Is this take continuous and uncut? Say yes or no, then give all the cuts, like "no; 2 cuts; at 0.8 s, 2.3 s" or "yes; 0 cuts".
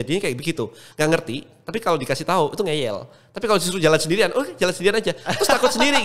yes; 0 cuts